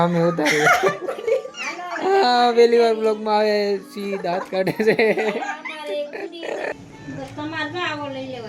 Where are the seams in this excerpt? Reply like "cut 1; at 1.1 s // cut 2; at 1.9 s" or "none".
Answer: cut 1; at 6.7 s